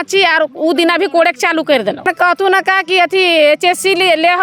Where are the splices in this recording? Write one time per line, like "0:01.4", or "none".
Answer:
0:02.1